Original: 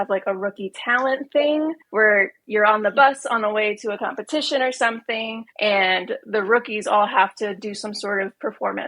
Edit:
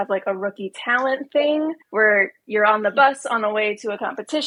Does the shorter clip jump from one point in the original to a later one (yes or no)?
no